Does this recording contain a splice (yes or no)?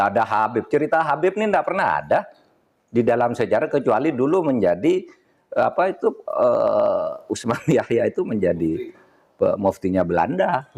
no